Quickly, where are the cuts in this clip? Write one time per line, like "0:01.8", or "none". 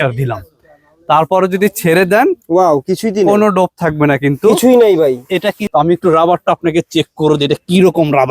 0:05.6